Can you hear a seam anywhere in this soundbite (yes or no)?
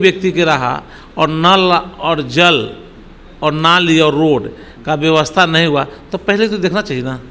no